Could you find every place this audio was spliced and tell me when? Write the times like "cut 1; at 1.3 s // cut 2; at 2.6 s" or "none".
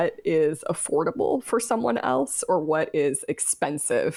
none